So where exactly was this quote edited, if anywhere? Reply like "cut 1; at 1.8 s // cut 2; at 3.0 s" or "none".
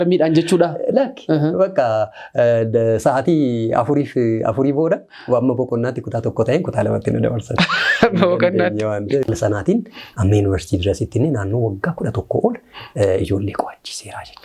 cut 1; at 9.2 s